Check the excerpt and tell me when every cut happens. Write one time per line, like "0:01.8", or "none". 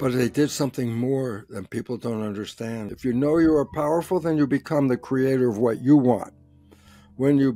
0:02.9